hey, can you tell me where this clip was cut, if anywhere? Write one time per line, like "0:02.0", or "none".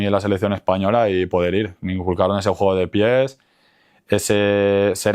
none